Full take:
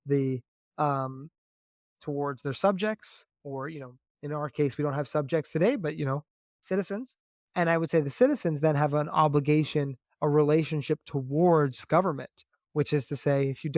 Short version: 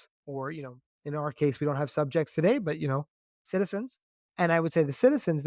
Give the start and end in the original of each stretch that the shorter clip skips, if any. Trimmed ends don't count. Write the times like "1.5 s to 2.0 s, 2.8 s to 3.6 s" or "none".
none